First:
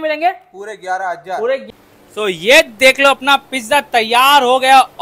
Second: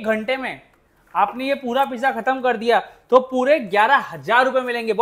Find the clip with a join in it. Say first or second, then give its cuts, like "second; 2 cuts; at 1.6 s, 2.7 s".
first; 1 cut; at 1.6 s